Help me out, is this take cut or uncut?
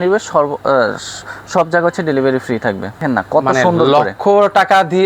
cut